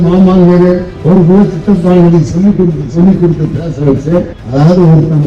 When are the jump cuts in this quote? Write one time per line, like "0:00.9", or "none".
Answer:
0:00.9
0:04.4